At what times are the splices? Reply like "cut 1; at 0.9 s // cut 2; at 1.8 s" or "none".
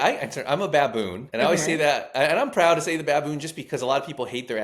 cut 1; at 1.2 s